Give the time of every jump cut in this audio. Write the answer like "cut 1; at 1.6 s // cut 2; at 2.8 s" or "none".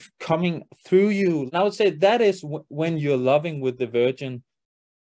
cut 1; at 1.5 s

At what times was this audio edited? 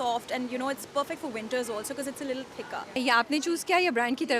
cut 1; at 3.0 s

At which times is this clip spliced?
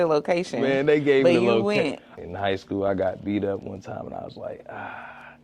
cut 1; at 2.1 s

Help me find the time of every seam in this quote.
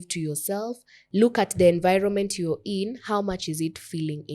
cut 1; at 1.0 s

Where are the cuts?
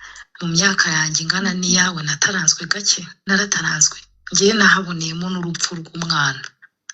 cut 1; at 3.2 s

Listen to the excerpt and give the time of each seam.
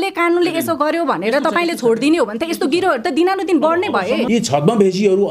cut 1; at 4.3 s

